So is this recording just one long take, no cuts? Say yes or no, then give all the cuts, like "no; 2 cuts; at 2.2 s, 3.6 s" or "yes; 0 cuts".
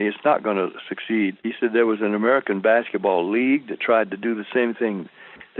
no; 1 cut; at 1.4 s